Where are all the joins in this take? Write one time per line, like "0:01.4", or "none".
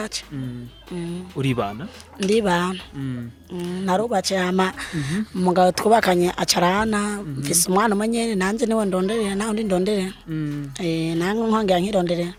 none